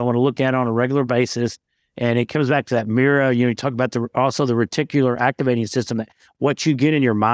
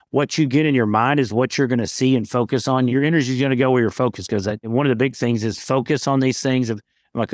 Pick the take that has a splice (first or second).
second